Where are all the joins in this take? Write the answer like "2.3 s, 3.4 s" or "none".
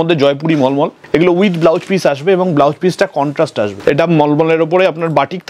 1.0 s, 3.7 s